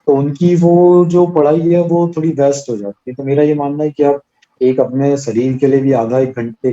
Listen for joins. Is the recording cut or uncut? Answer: uncut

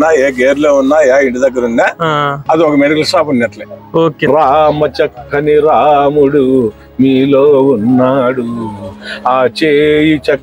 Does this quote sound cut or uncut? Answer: cut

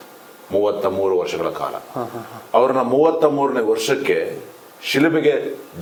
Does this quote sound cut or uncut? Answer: uncut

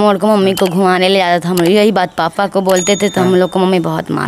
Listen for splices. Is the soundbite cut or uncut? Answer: uncut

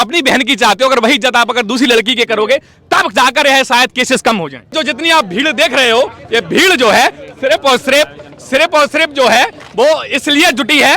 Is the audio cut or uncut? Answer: cut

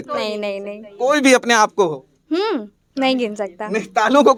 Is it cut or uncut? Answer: uncut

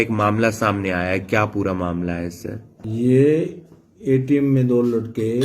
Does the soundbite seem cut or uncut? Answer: cut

